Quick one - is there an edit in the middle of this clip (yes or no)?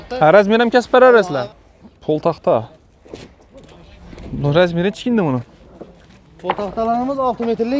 yes